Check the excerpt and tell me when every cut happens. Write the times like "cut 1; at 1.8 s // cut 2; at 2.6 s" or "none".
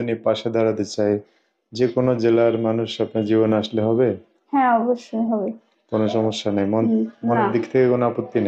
none

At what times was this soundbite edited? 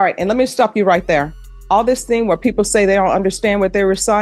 none

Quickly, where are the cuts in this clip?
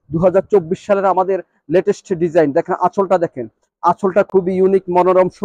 none

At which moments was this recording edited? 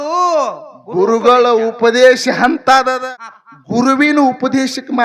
cut 1; at 3.0 s

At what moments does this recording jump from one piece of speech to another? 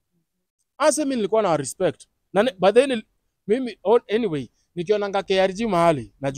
none

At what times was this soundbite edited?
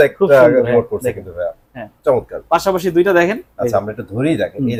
none

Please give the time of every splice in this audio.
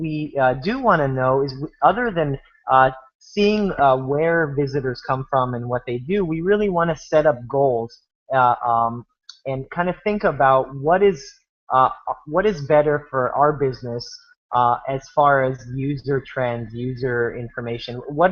cut 1; at 16.7 s

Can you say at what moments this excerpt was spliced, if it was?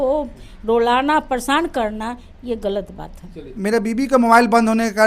cut 1; at 3.4 s

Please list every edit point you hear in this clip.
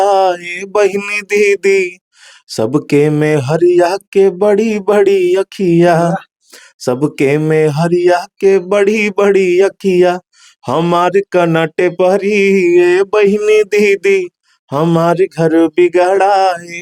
none

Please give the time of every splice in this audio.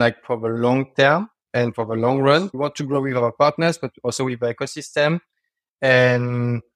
cut 1; at 2.5 s

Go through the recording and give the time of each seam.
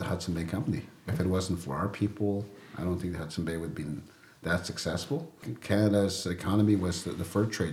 cut 1; at 1.1 s // cut 2; at 5.4 s

